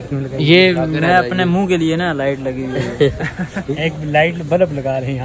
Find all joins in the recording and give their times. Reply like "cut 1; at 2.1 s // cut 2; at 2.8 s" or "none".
cut 1; at 3.6 s

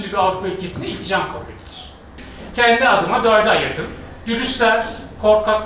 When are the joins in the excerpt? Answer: none

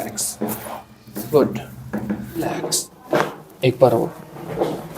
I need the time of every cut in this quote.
cut 1; at 2.6 s

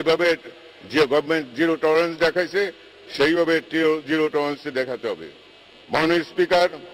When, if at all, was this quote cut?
none

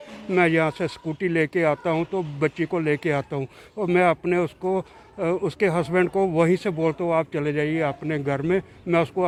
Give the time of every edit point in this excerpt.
none

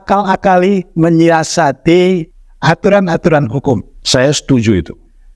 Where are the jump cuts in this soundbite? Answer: cut 1; at 2.3 s // cut 2; at 3.9 s

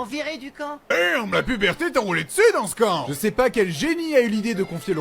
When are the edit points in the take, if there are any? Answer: cut 1; at 0.9 s

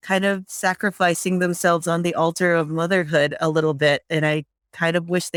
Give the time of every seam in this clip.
none

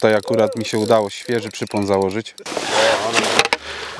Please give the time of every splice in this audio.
cut 1; at 2.5 s

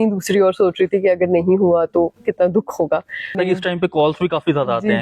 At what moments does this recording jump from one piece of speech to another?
cut 1; at 3.4 s

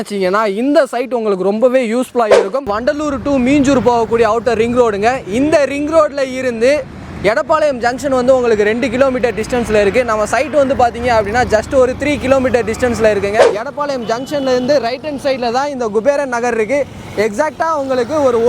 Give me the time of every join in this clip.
cut 1; at 2.6 s // cut 2; at 13.4 s

